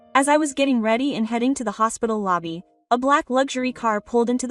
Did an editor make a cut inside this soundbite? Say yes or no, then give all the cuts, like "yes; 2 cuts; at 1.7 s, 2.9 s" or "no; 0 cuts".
no; 0 cuts